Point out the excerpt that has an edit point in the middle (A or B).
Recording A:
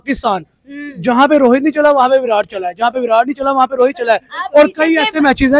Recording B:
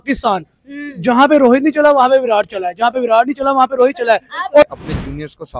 B